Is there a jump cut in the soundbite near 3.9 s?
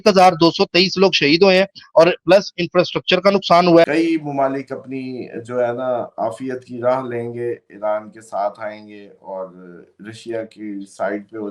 yes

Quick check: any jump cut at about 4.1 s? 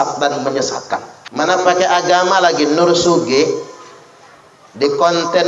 no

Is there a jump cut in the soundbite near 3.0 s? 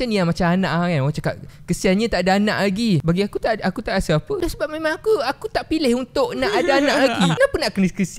yes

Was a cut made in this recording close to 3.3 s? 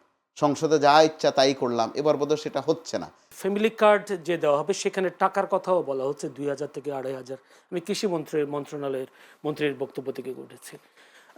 yes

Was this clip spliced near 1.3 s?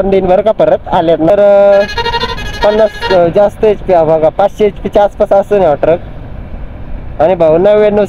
yes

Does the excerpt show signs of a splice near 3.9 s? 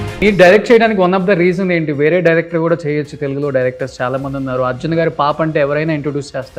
no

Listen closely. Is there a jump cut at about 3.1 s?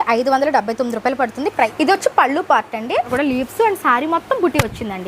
yes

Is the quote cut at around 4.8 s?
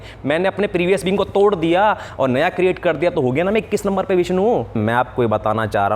yes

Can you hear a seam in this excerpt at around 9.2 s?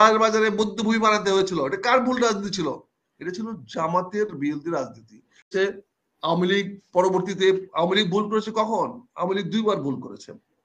no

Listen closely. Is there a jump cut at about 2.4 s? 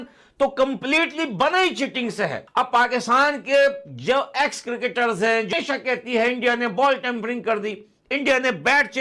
yes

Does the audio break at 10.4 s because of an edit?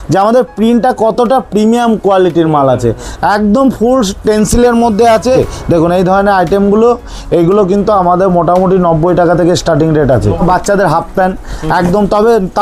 yes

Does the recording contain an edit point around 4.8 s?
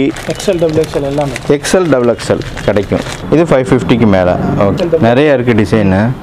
yes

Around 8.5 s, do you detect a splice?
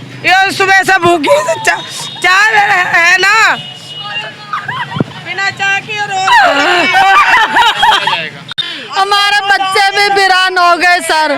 yes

